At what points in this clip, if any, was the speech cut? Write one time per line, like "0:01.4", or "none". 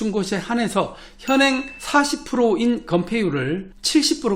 0:01.7